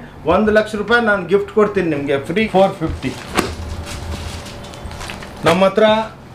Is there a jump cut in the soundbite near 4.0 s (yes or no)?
no